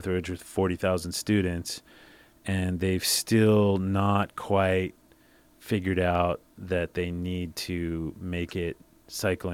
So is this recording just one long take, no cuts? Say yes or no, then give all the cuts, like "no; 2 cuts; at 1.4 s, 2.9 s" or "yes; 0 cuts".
yes; 0 cuts